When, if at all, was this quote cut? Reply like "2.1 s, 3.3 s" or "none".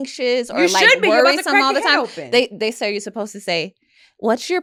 none